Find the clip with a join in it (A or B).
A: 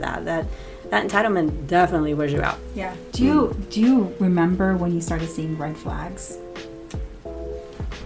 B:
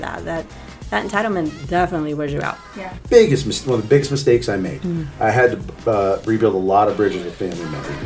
B